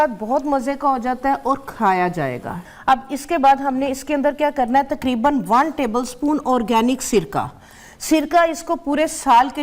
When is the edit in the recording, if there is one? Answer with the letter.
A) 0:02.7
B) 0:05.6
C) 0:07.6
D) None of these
A